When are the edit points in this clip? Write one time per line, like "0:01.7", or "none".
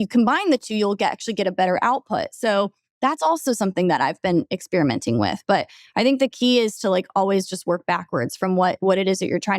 none